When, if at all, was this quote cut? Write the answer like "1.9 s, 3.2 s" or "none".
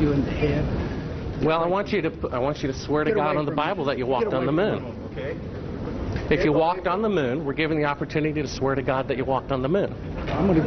none